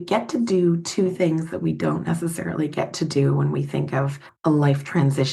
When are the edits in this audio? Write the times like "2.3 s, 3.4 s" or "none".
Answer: 4.2 s